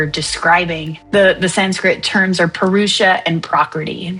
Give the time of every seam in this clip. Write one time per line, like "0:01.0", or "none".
0:00.9